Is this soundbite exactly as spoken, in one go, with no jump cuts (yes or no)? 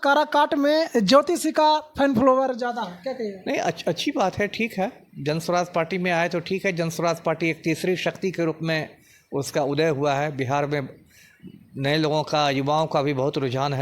yes